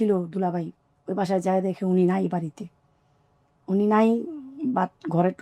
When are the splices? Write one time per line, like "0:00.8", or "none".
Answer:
none